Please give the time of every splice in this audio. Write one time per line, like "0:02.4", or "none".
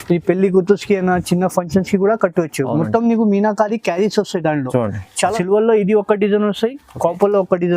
0:05.3

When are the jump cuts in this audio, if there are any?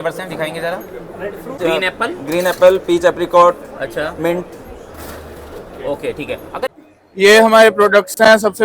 0:01.6
0:06.8

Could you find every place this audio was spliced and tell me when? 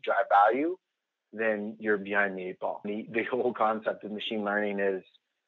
0:02.8

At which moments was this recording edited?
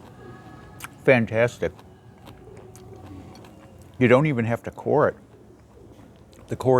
none

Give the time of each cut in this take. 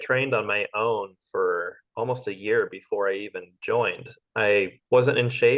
0:04.2

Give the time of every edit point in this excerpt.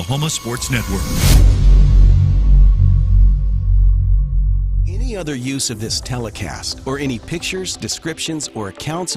0:04.8

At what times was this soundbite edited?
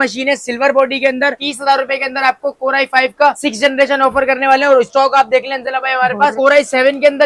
0:01.3
0:06.3

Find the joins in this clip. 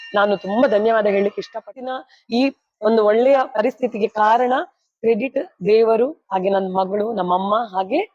0:01.7

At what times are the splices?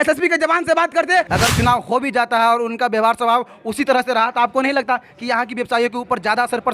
0:01.3

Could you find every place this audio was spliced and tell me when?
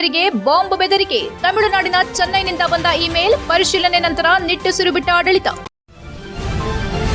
0:05.6

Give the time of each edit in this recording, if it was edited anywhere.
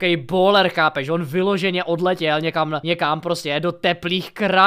0:02.8

